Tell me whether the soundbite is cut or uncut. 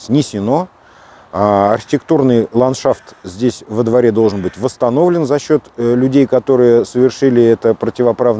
uncut